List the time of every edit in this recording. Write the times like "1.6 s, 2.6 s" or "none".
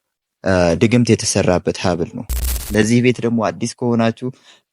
2.6 s